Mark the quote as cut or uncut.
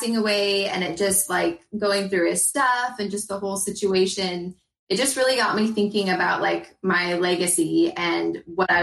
uncut